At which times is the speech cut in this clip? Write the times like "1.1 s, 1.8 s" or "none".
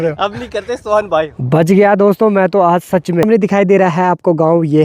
1.4 s, 3.2 s